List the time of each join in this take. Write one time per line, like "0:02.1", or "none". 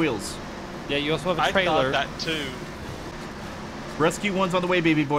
0:03.1